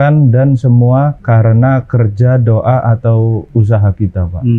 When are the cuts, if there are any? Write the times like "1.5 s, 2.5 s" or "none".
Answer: 1.2 s, 3.5 s